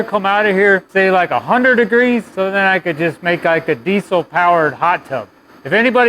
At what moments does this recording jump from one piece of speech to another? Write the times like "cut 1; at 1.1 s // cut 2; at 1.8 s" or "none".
cut 1; at 0.9 s // cut 2; at 2.3 s